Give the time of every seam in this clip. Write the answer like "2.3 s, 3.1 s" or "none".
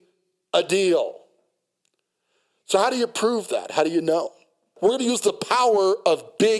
4.7 s